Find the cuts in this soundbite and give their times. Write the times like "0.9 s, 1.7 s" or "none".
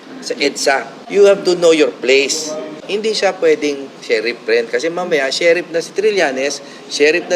1.0 s, 2.8 s